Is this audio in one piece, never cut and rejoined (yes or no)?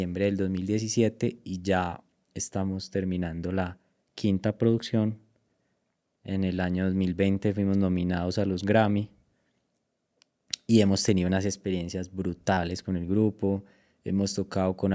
yes